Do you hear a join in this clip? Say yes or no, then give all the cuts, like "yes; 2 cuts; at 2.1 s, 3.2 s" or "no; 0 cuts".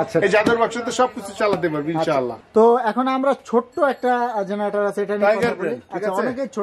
no; 0 cuts